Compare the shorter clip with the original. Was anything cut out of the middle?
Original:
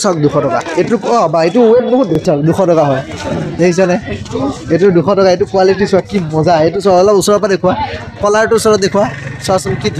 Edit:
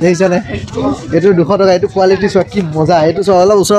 no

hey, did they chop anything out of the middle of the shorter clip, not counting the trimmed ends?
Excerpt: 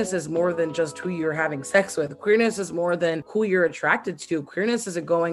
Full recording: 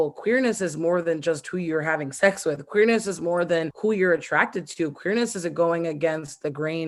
no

